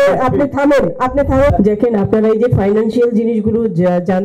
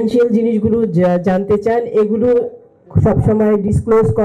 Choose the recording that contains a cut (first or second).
first